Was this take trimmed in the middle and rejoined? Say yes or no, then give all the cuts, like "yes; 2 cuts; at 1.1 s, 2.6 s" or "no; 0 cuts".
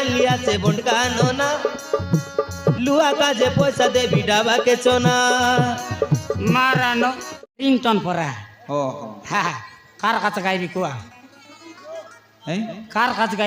yes; 1 cut; at 7.3 s